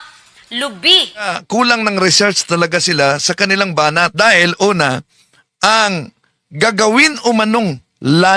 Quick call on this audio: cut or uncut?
cut